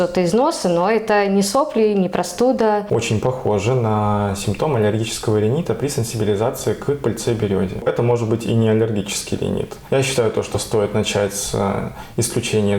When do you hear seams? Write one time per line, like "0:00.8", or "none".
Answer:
0:02.8
0:07.8
0:09.7

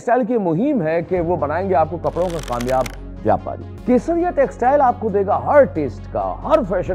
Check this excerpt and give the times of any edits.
0:03.7

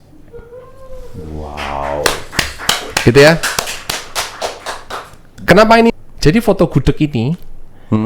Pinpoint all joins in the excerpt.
0:05.9

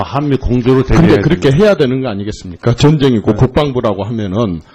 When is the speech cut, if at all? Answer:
0:03.4

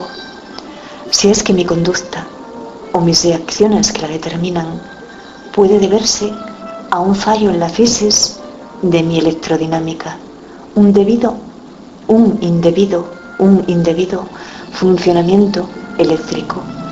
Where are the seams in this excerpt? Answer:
none

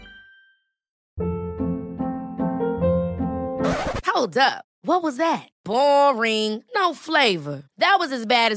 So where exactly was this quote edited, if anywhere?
0:01.0

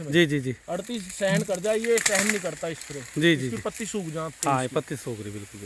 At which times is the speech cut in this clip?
none

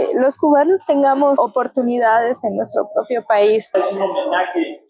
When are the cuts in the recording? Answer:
0:03.8

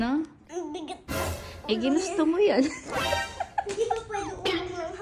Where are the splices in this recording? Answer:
none

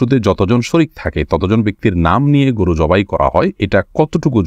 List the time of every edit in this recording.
0:03.6

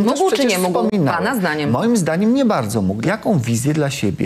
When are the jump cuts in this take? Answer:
0:03.0

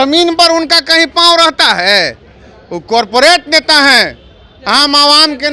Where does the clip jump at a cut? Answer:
none

